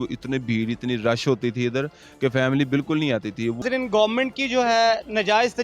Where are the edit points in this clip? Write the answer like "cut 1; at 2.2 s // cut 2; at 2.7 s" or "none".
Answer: cut 1; at 3.6 s

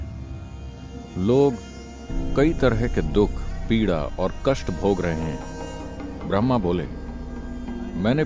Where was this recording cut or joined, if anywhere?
none

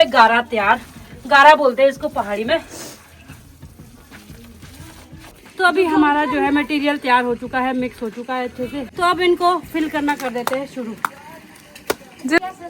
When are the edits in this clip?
none

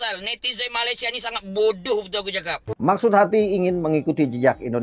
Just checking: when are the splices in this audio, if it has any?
cut 1; at 2.8 s

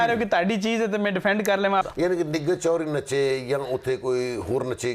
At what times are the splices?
cut 1; at 1.8 s

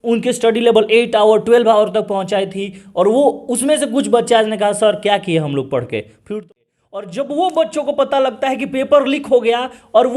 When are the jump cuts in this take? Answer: cut 1; at 6.4 s

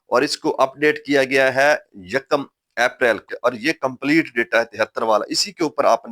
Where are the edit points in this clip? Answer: cut 1; at 3.3 s

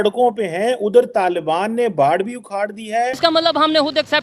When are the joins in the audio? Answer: cut 1; at 3.2 s

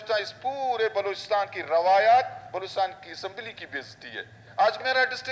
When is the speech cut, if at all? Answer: cut 1; at 4.4 s

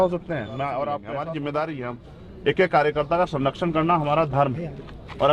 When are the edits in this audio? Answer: cut 1; at 1.0 s

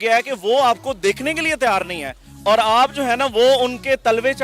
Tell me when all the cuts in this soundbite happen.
none

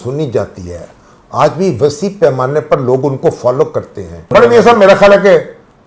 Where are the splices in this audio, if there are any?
cut 1; at 4.3 s

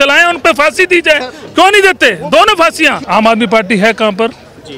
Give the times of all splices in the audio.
cut 1; at 3.0 s

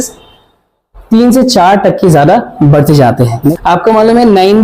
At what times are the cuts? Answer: cut 1; at 3.6 s

